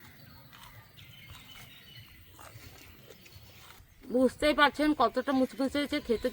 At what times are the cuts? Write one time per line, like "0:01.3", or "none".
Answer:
0:01.0
0:03.8